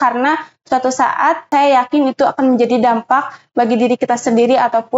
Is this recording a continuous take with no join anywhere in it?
no; 1 cut; at 1.5 s

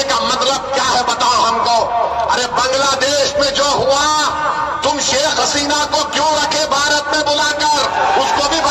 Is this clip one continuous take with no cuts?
yes; 0 cuts

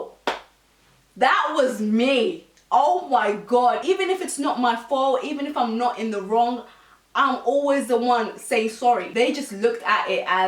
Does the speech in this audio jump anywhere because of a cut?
yes; 2 cuts; at 3.8 s, 9.1 s

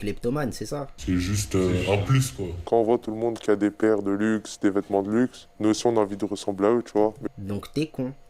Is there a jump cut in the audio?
yes; 1 cut; at 0.9 s

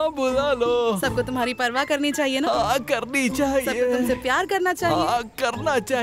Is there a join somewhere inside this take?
no; 0 cuts

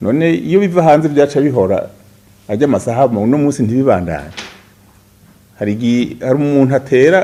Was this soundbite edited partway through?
no; 0 cuts

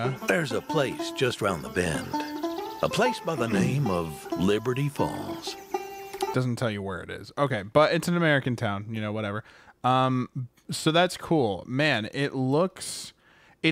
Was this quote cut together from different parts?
no; 0 cuts

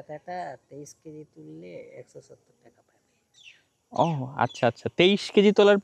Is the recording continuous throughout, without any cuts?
yes; 0 cuts

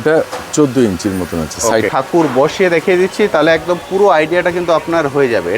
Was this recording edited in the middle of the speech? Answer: yes; 1 cut; at 1.9 s

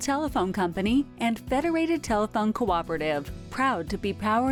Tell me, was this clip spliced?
no; 0 cuts

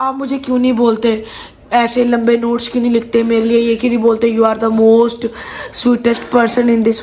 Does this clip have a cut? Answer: no; 0 cuts

